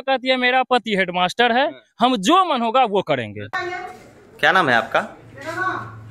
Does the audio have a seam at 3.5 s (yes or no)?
yes